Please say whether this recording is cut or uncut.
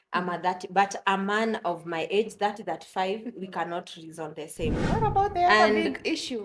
cut